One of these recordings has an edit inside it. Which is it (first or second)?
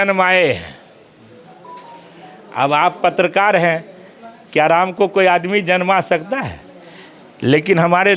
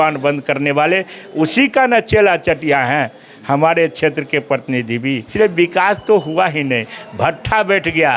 second